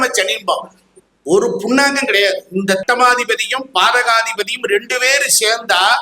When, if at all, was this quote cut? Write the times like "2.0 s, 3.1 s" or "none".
2.8 s